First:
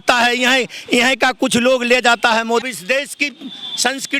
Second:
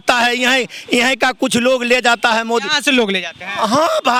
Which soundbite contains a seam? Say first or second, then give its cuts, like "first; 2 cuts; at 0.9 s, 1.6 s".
first; 1 cut; at 2.7 s